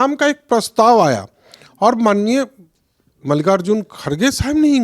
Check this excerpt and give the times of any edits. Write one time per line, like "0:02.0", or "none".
none